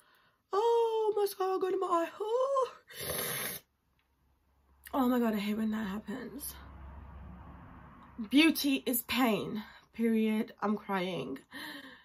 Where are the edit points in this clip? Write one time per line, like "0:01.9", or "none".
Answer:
none